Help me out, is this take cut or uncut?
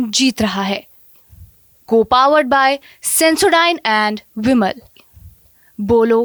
uncut